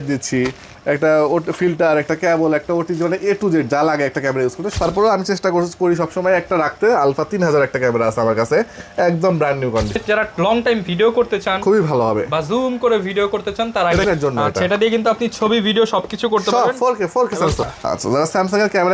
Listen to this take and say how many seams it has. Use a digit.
4